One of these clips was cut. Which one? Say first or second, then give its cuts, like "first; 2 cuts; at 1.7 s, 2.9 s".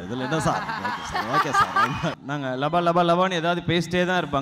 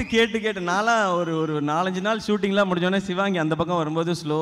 first; 1 cut; at 2.2 s